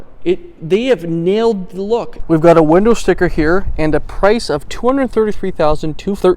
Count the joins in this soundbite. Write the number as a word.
one